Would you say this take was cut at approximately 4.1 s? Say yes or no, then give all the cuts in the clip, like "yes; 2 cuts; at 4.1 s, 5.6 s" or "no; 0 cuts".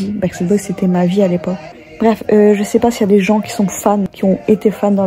yes; 2 cuts; at 1.6 s, 4.1 s